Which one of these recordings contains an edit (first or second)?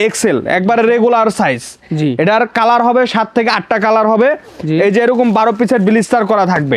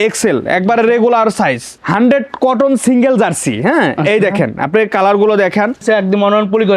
second